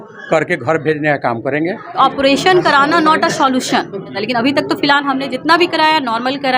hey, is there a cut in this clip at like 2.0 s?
yes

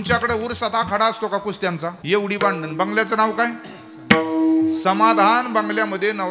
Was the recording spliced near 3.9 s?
no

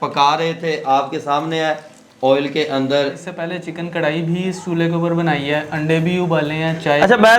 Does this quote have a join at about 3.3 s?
yes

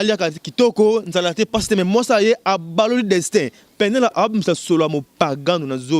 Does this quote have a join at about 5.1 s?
no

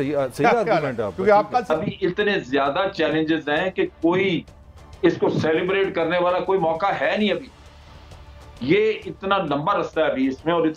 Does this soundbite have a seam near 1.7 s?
yes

